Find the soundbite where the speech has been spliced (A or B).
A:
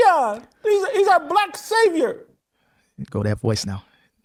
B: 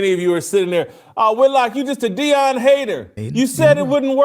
B